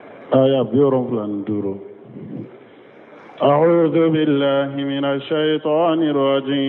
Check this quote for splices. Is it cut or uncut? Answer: uncut